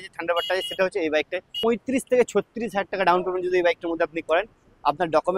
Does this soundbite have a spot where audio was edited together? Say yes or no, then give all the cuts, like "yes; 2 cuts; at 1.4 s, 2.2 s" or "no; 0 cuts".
yes; 1 cut; at 1.5 s